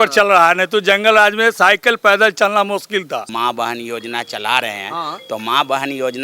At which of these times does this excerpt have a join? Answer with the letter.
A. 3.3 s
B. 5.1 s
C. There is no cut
A